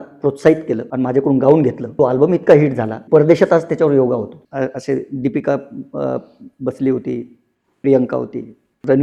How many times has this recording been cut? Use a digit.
4